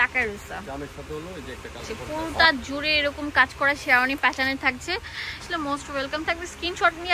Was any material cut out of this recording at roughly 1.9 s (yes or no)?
yes